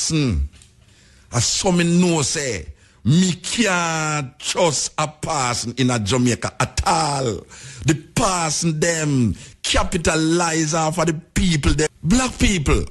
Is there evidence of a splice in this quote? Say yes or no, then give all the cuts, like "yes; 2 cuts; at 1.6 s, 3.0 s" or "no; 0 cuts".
yes; 1 cut; at 11.9 s